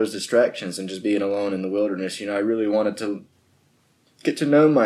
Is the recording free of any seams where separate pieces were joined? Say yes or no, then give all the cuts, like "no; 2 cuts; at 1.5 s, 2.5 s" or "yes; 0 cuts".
yes; 0 cuts